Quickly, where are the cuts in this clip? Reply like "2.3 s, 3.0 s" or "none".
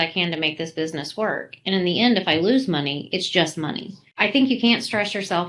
none